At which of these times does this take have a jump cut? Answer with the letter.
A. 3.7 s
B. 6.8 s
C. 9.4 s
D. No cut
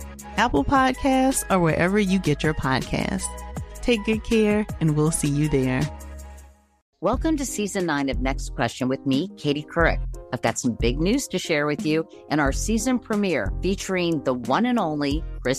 B